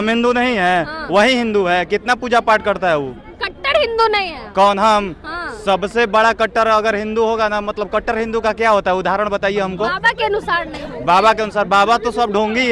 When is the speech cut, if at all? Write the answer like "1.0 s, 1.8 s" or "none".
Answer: none

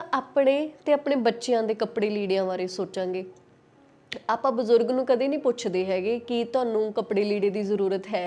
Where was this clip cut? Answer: none

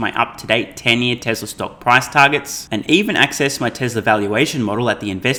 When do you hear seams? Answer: none

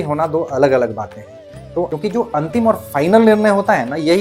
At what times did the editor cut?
1.9 s

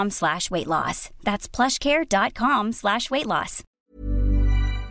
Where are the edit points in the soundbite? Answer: 3.8 s

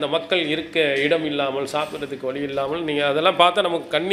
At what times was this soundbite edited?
none

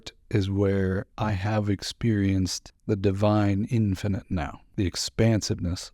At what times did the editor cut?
1.1 s, 2.7 s, 4.6 s

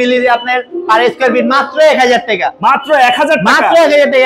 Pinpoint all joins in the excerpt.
none

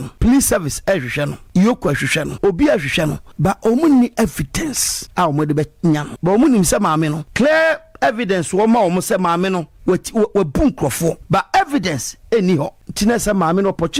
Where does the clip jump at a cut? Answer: none

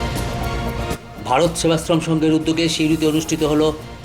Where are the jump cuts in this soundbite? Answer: 0.9 s

